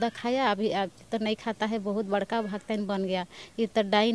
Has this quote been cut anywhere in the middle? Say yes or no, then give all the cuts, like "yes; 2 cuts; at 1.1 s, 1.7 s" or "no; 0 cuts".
no; 0 cuts